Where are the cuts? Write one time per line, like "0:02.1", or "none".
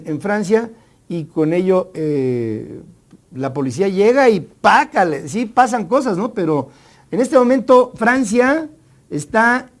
0:03.6